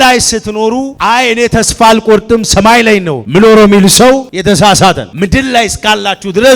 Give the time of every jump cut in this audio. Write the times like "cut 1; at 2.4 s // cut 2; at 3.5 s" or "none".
cut 1; at 0.9 s // cut 2; at 3.2 s // cut 3; at 4.3 s // cut 4; at 5.1 s